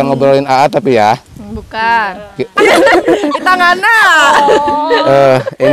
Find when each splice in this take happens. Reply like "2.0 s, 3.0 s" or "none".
2.5 s